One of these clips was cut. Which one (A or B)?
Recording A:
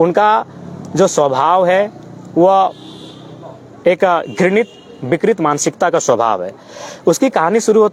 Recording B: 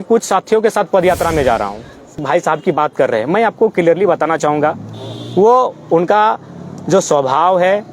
B